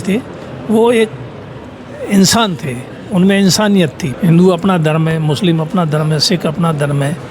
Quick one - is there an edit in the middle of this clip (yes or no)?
yes